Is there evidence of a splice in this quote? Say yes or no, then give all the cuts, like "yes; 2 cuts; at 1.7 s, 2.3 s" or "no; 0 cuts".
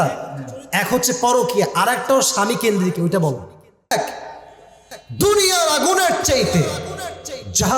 yes; 1 cut; at 3.9 s